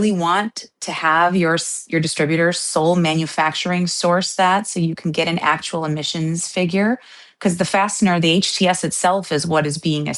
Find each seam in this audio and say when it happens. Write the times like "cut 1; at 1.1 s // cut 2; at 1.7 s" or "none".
none